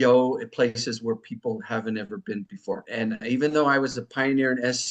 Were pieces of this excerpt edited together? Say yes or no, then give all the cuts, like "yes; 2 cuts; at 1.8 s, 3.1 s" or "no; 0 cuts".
yes; 1 cut; at 2.8 s